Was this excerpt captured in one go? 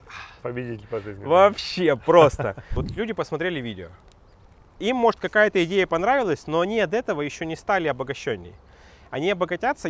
no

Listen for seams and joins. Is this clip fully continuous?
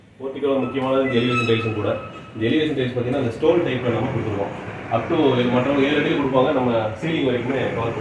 yes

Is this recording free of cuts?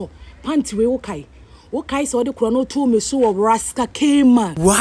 yes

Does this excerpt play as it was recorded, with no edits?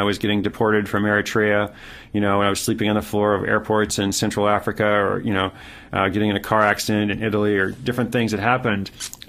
yes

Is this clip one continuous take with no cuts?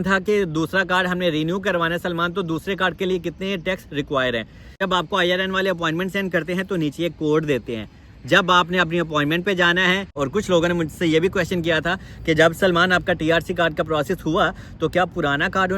no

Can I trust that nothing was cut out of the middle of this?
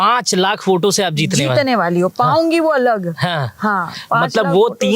yes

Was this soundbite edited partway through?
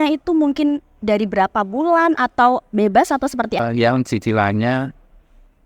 yes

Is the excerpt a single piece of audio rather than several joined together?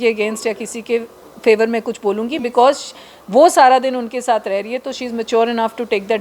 yes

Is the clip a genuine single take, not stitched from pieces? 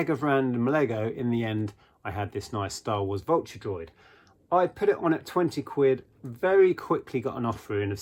yes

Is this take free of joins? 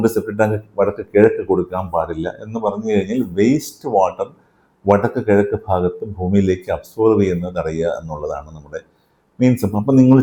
yes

